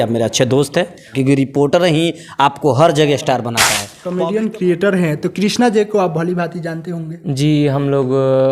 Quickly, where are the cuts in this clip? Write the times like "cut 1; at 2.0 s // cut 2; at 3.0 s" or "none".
cut 1; at 1.1 s // cut 2; at 3.5 s